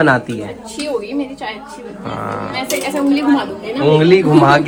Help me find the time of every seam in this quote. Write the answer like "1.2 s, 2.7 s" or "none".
none